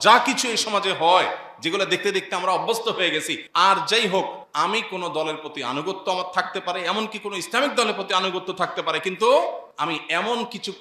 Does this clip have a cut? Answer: yes; 3 cuts; at 3.4 s, 4.4 s, 9.7 s

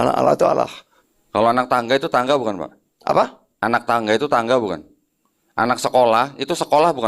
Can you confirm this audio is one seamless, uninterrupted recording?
no; 1 cut; at 0.9 s

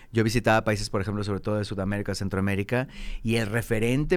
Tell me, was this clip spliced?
no; 0 cuts

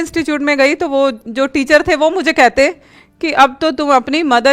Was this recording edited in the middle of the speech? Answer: yes; 1 cut; at 1.2 s

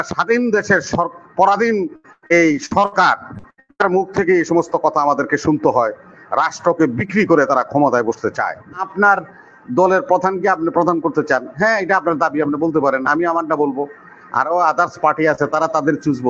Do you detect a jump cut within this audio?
yes; 1 cut; at 8.8 s

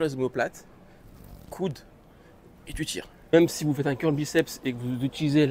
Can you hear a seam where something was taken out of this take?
yes; 1 cut; at 3.3 s

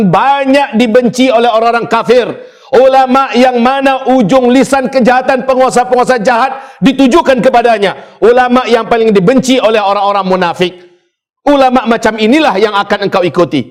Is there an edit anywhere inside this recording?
no; 0 cuts

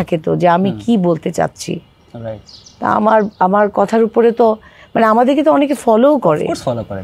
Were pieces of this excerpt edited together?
no; 0 cuts

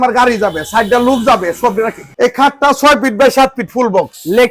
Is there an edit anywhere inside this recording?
yes; 1 cut; at 2.1 s

